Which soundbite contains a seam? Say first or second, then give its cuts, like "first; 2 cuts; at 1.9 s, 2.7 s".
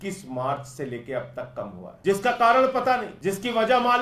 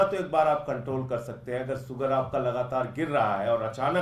first; 2 cuts; at 1.9 s, 3.1 s